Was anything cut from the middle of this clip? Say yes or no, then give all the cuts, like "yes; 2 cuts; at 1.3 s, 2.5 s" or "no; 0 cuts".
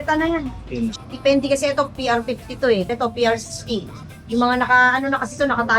yes; 2 cuts; at 1.1 s, 2.9 s